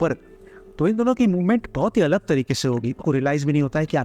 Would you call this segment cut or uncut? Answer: cut